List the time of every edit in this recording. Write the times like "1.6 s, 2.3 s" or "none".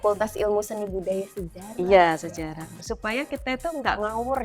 2.8 s